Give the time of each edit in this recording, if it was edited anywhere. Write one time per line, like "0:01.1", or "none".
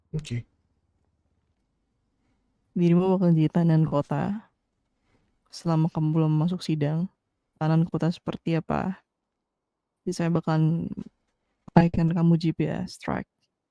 0:01.6